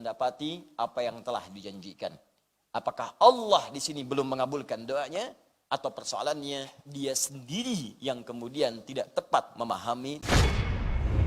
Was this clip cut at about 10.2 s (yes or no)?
yes